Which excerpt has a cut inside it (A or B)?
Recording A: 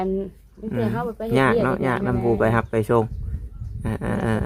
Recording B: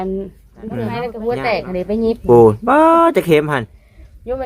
B